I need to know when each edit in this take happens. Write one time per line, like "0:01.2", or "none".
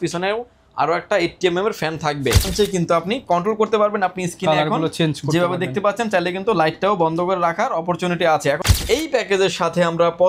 0:02.5
0:08.6